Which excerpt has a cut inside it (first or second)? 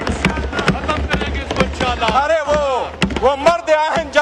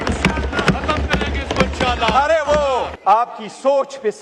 second